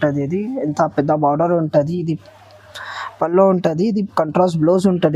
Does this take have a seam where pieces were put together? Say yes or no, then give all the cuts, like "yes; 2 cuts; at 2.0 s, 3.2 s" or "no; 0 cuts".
no; 0 cuts